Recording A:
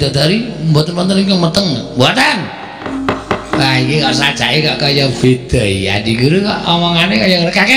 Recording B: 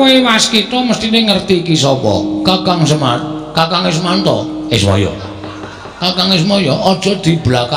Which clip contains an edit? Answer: A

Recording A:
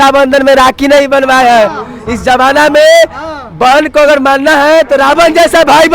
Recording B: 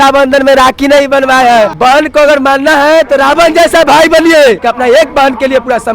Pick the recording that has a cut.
B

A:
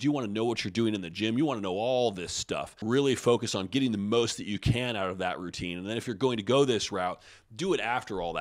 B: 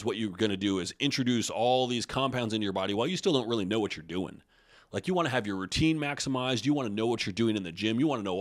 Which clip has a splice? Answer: A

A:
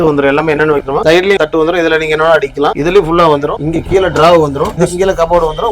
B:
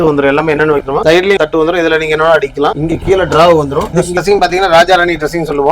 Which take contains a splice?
B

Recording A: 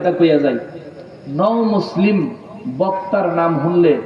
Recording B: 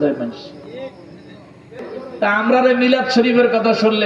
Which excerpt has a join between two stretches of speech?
B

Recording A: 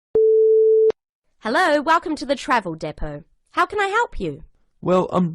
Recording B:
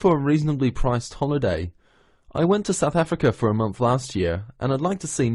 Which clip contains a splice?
A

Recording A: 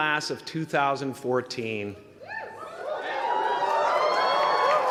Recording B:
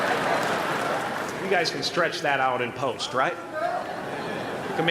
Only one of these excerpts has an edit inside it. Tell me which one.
B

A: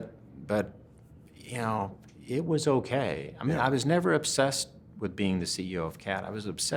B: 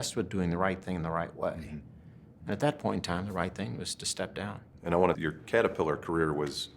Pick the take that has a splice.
B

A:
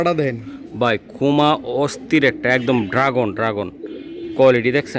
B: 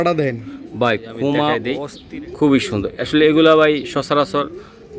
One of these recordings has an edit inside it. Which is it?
B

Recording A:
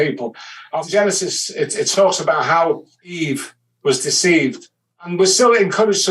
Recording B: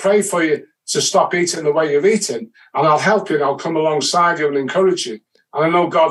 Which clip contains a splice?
A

